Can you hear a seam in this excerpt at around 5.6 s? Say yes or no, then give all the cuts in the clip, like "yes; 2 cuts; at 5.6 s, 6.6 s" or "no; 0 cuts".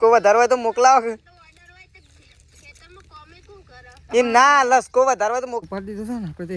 yes; 1 cut; at 5.6 s